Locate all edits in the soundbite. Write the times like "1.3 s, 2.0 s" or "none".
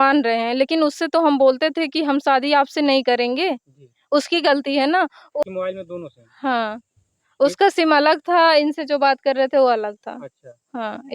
5.4 s